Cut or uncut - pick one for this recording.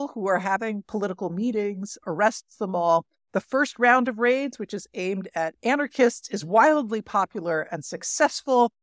cut